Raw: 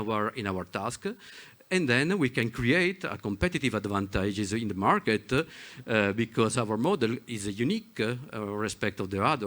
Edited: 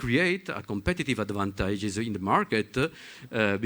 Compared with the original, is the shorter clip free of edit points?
yes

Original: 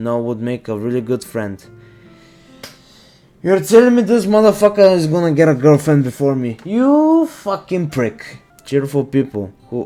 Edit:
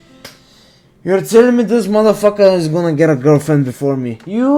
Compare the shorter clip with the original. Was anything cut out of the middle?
no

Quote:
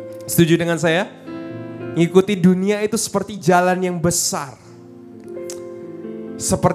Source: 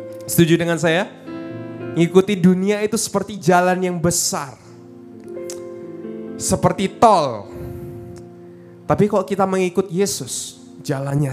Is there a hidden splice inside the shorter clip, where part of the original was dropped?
no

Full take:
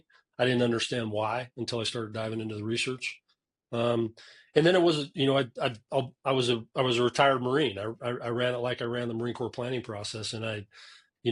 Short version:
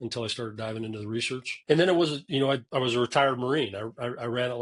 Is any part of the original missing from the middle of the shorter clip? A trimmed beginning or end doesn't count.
yes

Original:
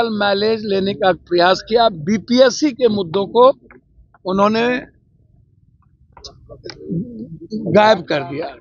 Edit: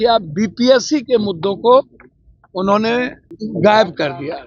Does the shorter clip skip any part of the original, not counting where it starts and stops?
yes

